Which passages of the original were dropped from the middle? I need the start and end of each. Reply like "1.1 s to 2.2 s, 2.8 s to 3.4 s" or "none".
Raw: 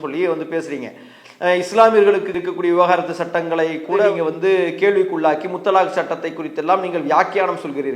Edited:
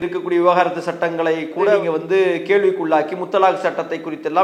none